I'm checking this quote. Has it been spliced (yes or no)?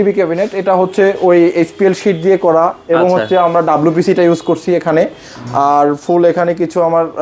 no